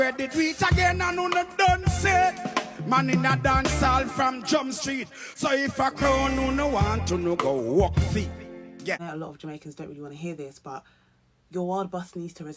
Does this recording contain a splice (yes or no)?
yes